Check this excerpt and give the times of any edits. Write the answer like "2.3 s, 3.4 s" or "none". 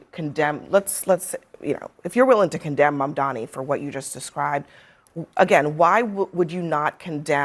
none